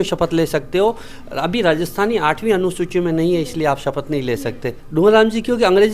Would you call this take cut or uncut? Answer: cut